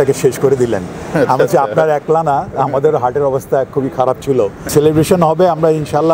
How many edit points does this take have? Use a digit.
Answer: 1